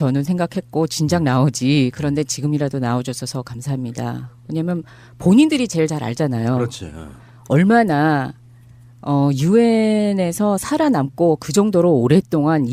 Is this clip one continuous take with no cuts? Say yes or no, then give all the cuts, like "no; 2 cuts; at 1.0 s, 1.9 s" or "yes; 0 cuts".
no; 1 cut; at 3.9 s